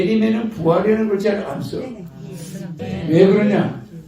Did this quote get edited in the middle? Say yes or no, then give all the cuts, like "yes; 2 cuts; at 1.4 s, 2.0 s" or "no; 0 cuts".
yes; 1 cut; at 2.8 s